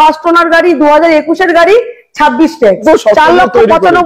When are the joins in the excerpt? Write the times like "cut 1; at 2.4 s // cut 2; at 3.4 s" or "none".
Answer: cut 1; at 2.8 s